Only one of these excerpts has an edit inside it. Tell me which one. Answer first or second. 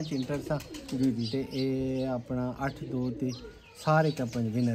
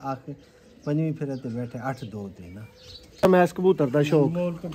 second